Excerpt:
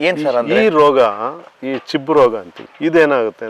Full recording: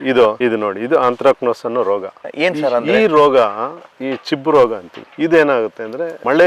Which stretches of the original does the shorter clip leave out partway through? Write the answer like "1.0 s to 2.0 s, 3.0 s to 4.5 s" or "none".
none